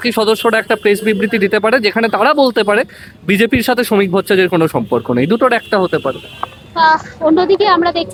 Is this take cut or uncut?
uncut